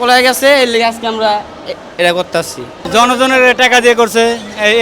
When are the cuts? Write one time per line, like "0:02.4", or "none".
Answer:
0:02.8